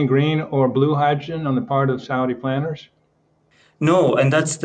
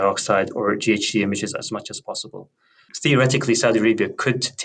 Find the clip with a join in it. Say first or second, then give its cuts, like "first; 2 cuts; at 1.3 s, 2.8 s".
second; 1 cut; at 2.9 s